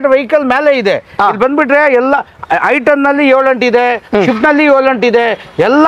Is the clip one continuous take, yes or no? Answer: yes